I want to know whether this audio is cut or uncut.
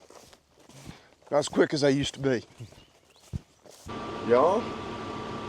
cut